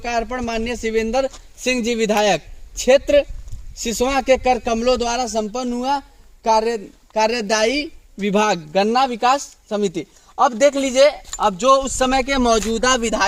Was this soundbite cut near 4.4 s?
no; 0 cuts

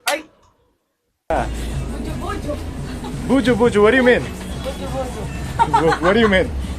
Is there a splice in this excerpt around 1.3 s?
yes; 1 cut; at 1.3 s

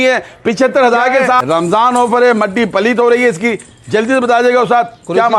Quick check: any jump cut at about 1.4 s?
yes; 1 cut; at 1.4 s

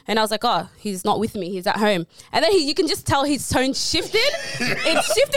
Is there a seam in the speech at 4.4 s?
no; 0 cuts

